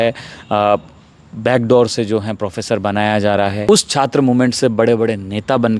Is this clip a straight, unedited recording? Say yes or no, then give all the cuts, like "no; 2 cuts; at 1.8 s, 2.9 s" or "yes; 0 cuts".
no; 1 cut; at 3.7 s